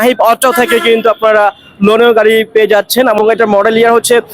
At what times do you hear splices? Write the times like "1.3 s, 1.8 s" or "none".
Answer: 3.2 s